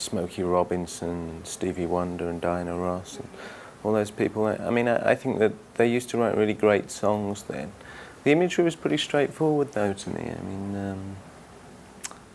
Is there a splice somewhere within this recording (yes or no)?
yes